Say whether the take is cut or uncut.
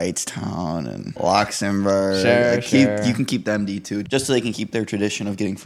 cut